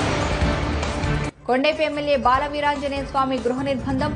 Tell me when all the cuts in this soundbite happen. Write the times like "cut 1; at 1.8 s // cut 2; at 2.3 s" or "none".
cut 1; at 1.3 s